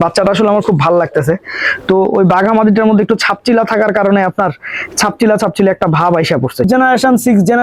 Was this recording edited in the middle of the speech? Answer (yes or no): yes